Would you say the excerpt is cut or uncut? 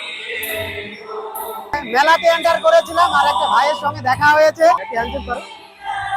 cut